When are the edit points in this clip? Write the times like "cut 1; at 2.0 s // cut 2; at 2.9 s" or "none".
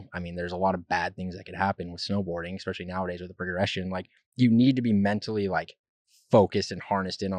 none